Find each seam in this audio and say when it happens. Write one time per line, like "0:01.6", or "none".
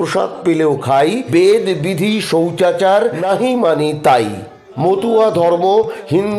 0:01.2
0:03.2
0:04.6